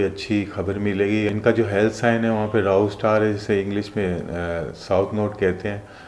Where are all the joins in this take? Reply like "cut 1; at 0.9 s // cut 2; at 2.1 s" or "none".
cut 1; at 1.3 s

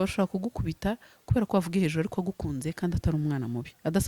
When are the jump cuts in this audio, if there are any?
none

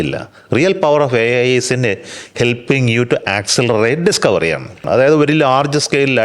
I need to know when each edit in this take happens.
cut 1; at 4.8 s

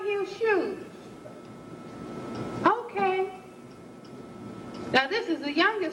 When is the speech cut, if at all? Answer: none

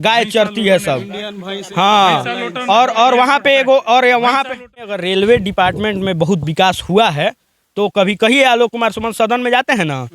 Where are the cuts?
cut 1; at 5.0 s

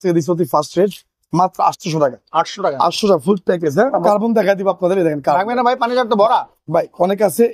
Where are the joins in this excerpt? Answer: cut 1; at 4.0 s

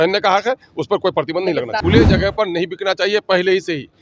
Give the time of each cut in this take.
cut 1; at 1.8 s

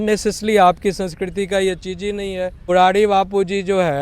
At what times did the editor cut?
cut 1; at 2.7 s

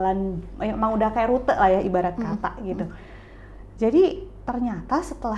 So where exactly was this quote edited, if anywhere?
none

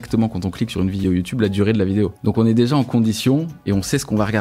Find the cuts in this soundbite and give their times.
cut 1; at 1.0 s // cut 2; at 2.2 s

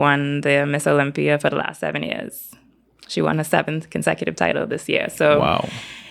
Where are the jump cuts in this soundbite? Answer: none

